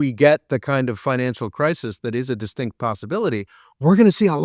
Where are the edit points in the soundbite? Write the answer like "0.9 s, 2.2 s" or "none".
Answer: none